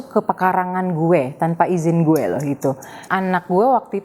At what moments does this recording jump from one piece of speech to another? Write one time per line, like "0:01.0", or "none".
0:03.0